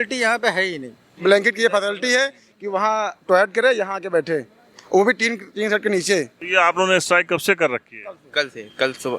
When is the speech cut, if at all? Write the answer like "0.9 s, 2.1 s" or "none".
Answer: 1.1 s, 6.4 s